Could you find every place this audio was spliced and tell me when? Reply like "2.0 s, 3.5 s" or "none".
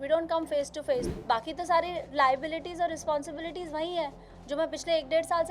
1.1 s